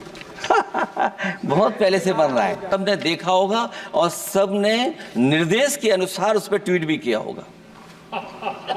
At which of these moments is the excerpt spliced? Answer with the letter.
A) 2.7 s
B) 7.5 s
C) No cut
A